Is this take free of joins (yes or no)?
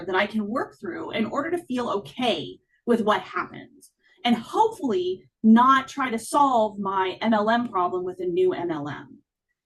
yes